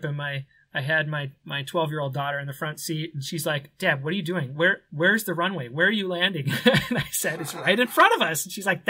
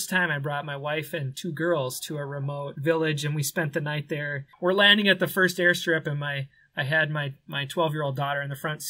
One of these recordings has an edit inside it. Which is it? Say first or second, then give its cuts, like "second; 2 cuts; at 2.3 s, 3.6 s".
second; 2 cuts; at 2.7 s, 4.4 s